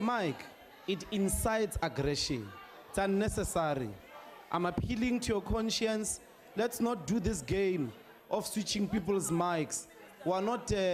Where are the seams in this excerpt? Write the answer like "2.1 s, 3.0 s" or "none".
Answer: none

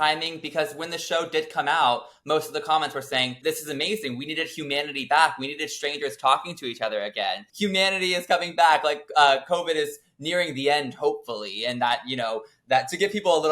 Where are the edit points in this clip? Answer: 3.4 s, 7.4 s

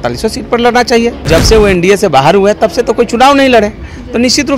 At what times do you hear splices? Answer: 1.2 s

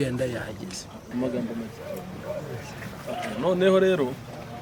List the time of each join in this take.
none

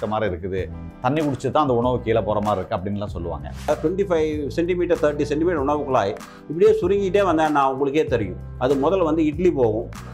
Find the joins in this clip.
3.7 s

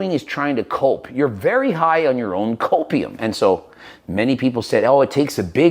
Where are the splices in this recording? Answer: 3.1 s

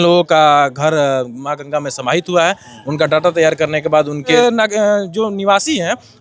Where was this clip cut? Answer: 4.3 s

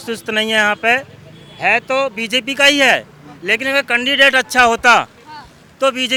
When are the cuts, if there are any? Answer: none

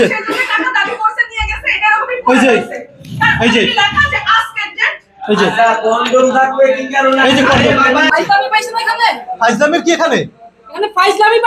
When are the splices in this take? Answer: 8.1 s

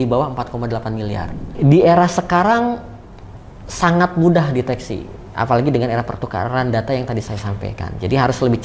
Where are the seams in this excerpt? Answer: 1.5 s

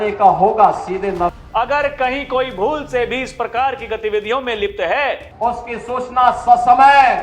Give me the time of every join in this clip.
1.3 s, 5.3 s

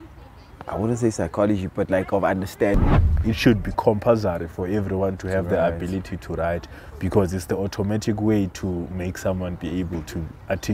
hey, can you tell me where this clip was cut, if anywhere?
3.2 s

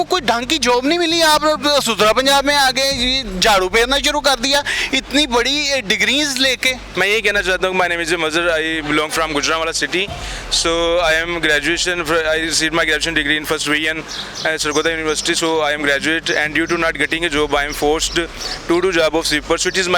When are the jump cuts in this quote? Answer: 6.8 s

